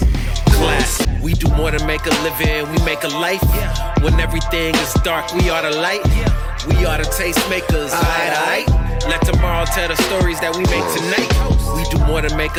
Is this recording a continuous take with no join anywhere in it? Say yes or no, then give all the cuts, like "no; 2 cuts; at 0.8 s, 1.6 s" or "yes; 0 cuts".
yes; 0 cuts